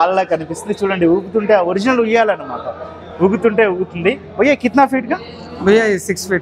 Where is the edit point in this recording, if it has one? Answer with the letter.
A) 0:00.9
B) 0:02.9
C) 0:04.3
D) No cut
D